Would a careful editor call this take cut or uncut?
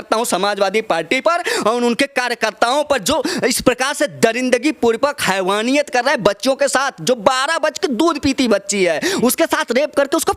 uncut